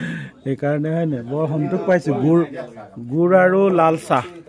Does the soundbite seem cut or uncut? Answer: uncut